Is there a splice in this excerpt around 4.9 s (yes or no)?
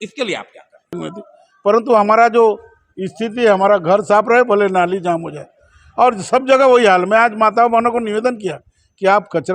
no